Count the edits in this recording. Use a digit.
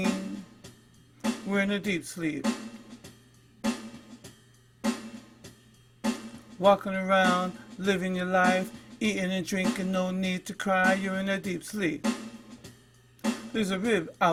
0